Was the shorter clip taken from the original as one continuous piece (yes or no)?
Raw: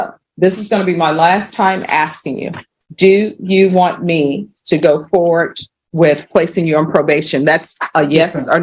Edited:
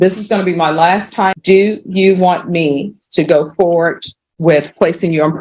no